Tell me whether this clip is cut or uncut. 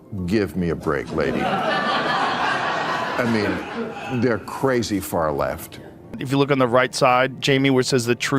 cut